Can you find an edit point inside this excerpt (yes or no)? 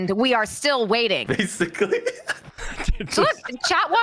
yes